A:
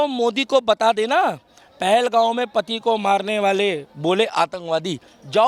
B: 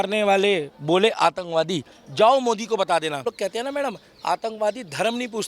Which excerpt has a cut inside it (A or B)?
B